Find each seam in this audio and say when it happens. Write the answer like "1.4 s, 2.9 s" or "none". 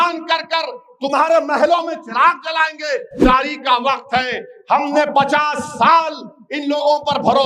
3.2 s